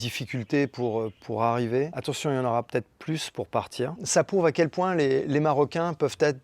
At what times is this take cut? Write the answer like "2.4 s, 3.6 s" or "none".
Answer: 2.0 s, 4.0 s